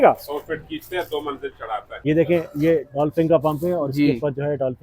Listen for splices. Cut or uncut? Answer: cut